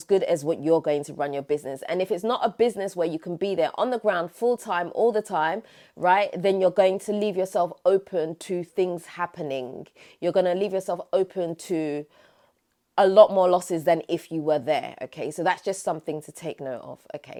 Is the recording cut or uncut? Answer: uncut